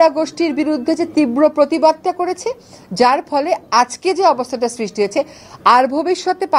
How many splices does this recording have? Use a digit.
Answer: 0